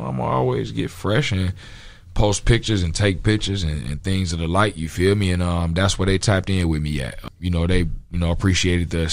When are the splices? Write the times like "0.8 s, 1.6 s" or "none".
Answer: 7.3 s